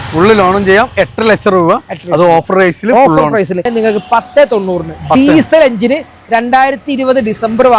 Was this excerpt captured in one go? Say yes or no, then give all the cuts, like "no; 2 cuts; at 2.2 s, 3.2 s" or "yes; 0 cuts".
no; 1 cut; at 3.7 s